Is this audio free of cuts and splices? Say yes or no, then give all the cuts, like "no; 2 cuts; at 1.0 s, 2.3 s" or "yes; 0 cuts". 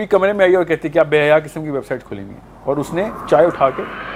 yes; 0 cuts